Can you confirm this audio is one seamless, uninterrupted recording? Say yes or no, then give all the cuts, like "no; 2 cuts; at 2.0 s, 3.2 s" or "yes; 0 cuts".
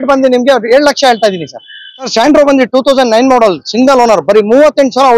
no; 1 cut; at 2.1 s